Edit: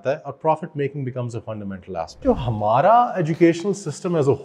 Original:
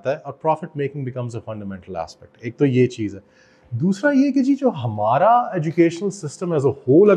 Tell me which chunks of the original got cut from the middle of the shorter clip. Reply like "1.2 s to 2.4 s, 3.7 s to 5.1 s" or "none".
2.2 s to 4.6 s